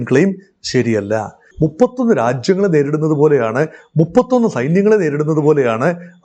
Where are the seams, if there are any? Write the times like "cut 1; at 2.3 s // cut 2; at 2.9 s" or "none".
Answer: cut 1; at 1.5 s